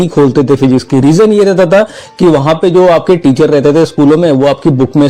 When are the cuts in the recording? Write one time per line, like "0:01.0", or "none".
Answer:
none